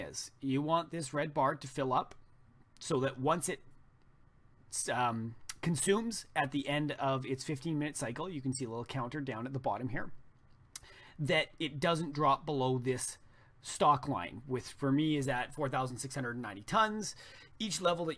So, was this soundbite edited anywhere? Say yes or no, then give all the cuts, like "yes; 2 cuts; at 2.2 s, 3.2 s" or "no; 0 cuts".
yes; 1 cut; at 9.9 s